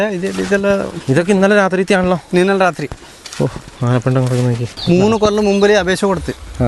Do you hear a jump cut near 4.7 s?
yes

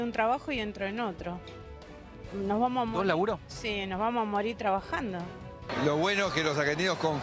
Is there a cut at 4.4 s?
no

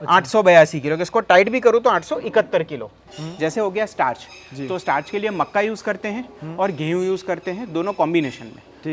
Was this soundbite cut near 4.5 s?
no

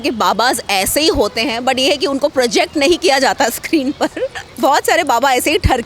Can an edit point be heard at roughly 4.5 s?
yes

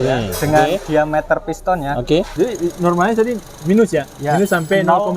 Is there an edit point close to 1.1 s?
no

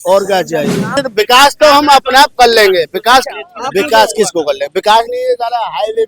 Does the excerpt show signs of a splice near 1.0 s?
yes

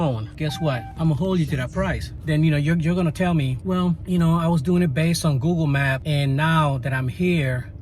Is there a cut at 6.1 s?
no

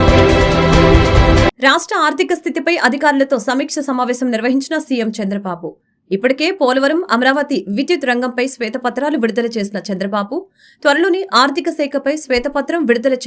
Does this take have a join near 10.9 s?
no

